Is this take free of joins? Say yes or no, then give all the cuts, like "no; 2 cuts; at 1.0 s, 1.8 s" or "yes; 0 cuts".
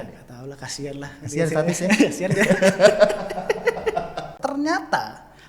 no; 1 cut; at 4.3 s